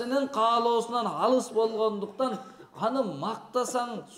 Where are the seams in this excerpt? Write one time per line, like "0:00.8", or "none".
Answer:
none